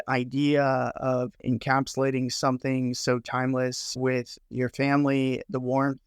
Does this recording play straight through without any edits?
no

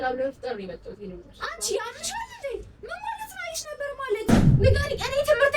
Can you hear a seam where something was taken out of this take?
yes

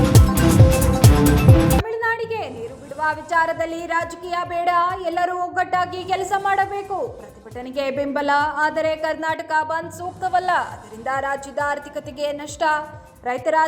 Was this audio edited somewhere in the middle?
yes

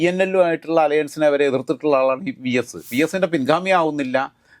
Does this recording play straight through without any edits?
no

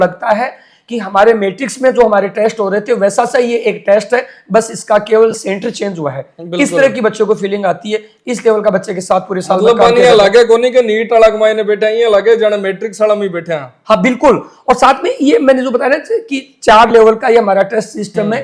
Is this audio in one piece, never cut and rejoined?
yes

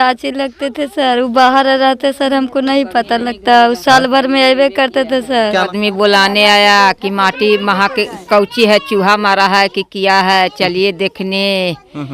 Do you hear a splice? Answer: yes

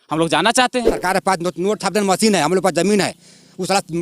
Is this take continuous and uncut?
no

